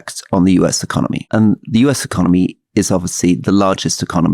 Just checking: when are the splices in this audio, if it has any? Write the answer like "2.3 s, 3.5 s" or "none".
1.3 s